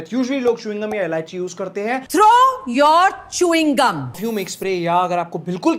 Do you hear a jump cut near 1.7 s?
no; 1 cut; at 4.2 s

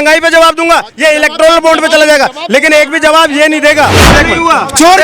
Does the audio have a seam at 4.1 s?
yes; 1 cut; at 4.1 s

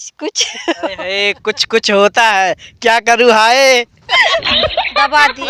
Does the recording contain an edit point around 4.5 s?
yes; 1 cut; at 4.5 s

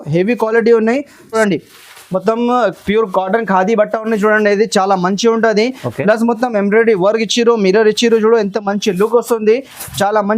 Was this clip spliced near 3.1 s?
no; 1 cut; at 1.4 s

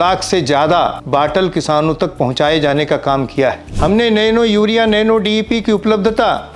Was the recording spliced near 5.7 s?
no; 2 cuts; at 1.0 s, 3.7 s

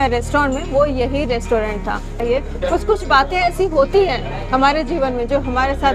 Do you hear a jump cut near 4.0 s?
no; 1 cut; at 2.2 s

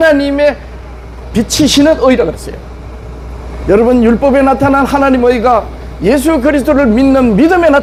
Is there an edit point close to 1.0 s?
no; 0 cuts

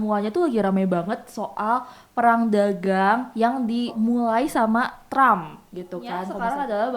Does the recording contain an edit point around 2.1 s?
no; 2 cuts; at 3.9 s, 6.0 s

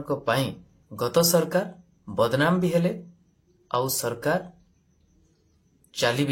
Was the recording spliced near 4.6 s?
no; 0 cuts

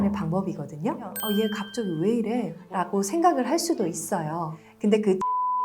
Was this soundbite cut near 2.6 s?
no; 1 cut; at 1.1 s

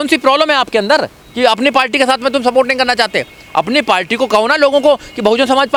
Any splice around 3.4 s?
no; 0 cuts

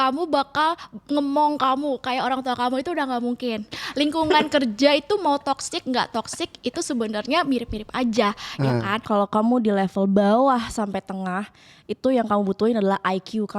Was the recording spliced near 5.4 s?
no; 2 cuts; at 3.8 s, 9.0 s

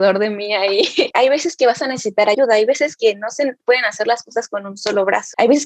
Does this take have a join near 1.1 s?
yes; 1 cut; at 1.1 s

